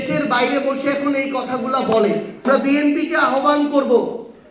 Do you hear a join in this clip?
yes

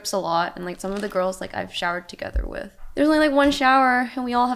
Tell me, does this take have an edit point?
yes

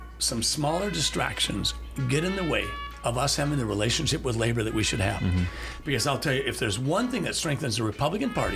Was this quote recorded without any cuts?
yes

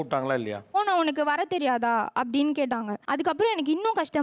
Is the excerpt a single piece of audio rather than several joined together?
no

